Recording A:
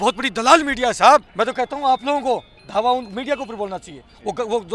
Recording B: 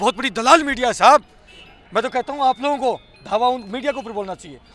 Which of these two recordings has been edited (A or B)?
A